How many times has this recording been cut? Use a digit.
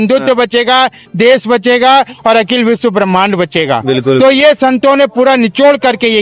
0